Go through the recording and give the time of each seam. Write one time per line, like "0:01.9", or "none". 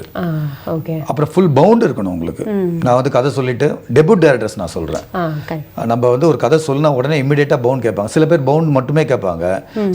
none